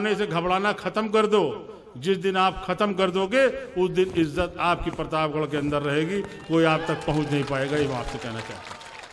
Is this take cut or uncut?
uncut